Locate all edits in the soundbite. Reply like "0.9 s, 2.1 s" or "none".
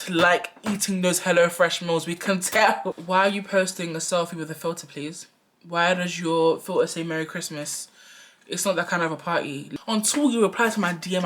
2.9 s, 9.6 s